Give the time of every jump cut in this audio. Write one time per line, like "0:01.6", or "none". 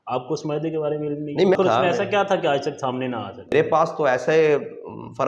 0:01.6
0:03.5